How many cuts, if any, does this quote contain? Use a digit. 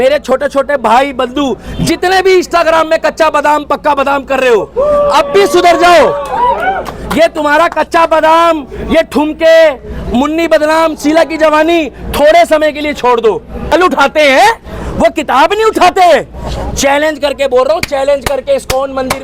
1